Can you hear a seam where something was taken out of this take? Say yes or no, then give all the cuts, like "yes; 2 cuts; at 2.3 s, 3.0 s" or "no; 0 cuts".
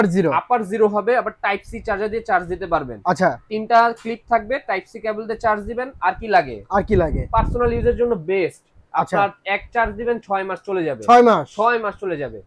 no; 0 cuts